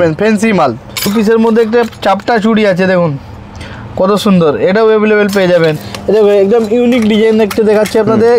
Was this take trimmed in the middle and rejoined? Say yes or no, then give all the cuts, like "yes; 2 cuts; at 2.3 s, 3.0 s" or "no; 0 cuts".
yes; 2 cuts; at 1.1 s, 5.9 s